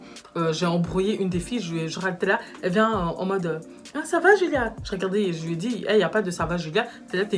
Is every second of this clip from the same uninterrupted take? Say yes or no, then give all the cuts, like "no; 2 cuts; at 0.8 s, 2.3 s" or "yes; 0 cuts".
yes; 0 cuts